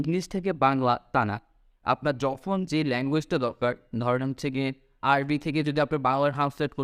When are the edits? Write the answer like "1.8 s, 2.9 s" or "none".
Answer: none